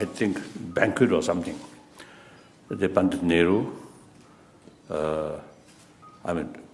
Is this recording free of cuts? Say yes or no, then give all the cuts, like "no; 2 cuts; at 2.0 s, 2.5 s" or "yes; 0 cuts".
yes; 0 cuts